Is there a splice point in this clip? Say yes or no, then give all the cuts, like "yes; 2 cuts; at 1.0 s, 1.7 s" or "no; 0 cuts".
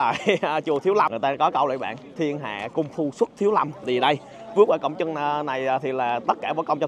yes; 1 cut; at 1.1 s